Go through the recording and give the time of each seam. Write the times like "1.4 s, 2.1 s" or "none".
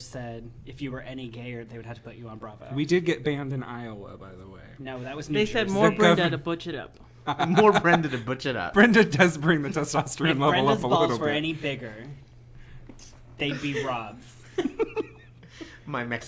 10.9 s